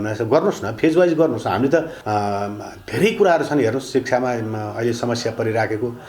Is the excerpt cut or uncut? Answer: cut